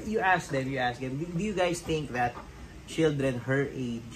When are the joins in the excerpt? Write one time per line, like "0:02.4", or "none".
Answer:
none